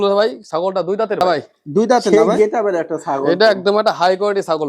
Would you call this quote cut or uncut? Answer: cut